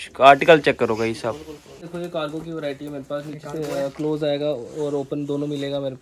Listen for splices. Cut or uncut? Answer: cut